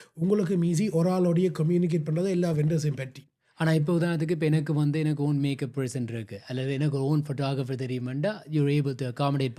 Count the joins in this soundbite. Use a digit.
0